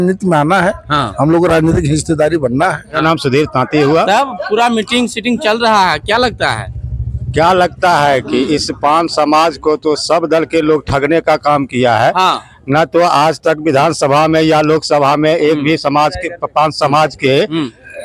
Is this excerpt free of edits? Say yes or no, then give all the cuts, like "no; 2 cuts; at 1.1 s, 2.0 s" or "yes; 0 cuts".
no; 1 cut; at 3.0 s